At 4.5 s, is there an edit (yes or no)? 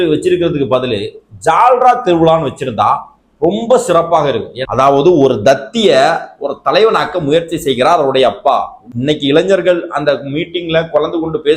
yes